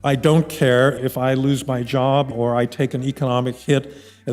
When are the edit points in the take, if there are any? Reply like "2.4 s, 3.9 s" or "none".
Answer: 1.0 s, 2.3 s